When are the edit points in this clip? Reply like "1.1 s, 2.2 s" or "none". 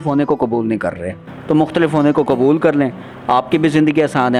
none